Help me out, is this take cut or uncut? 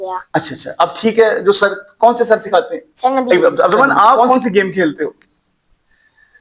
cut